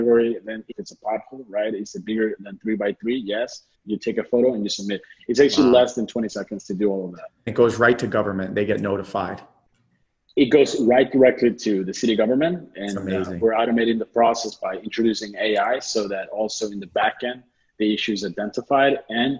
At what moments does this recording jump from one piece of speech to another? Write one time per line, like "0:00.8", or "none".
0:00.8
0:03.8
0:07.5